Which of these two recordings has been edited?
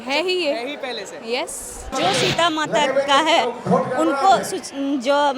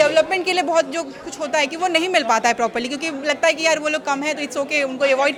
first; 1 cut; at 1.9 s

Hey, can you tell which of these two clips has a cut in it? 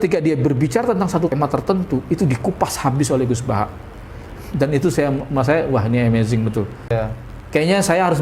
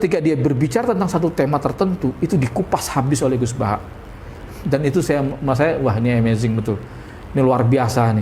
first; 2 cuts; at 1.3 s, 6.9 s

